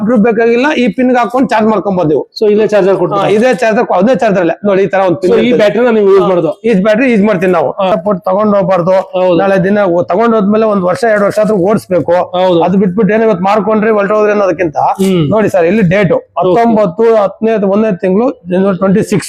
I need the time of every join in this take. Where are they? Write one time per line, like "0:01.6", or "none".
0:07.9